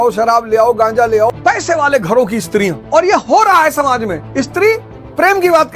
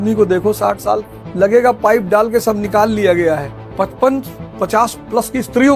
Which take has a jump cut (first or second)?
first